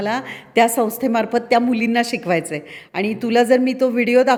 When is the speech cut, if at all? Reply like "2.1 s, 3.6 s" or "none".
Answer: none

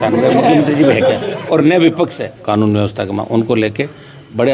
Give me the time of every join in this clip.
2.3 s

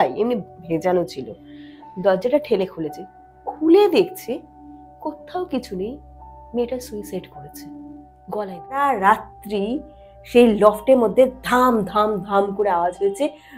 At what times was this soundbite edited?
8.9 s

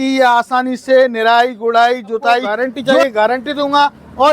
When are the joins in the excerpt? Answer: 2.5 s

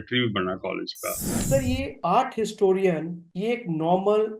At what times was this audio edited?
1.2 s

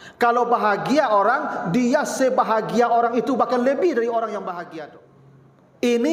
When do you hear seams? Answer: 4.7 s

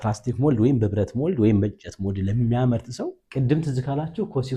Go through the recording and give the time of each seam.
3.2 s

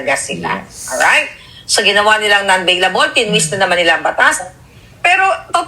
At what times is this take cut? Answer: 4.5 s

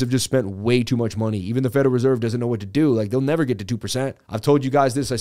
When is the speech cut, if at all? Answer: 4.2 s

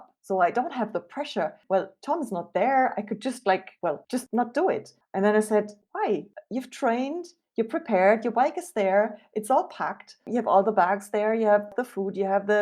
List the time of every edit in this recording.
1.6 s, 4.0 s, 5.0 s

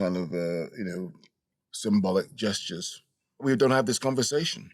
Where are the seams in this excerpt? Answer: 3.4 s

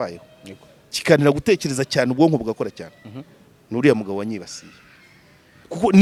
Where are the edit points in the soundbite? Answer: none

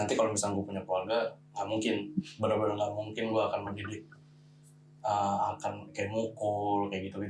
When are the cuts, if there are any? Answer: none

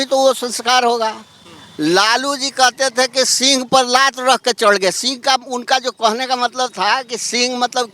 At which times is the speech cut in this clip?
none

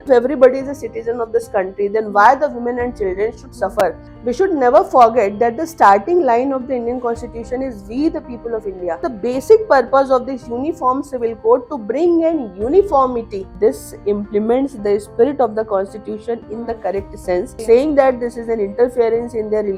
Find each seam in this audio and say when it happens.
4.1 s, 9.0 s, 13.4 s, 17.6 s

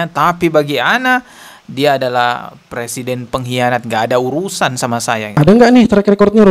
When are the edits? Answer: 5.3 s

